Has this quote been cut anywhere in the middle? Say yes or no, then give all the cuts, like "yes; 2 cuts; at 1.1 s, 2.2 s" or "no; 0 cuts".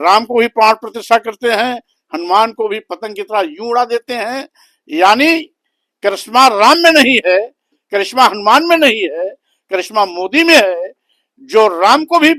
no; 0 cuts